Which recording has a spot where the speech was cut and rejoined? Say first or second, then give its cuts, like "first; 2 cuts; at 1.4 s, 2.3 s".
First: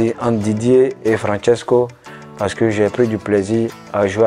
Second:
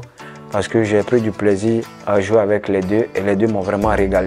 first; 1 cut; at 1.0 s